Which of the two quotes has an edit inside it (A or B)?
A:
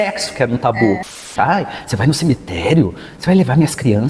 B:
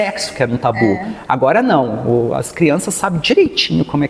A